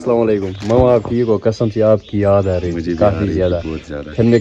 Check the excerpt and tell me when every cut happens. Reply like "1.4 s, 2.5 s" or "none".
none